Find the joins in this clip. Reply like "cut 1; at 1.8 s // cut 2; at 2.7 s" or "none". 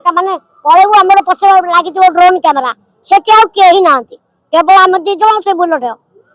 none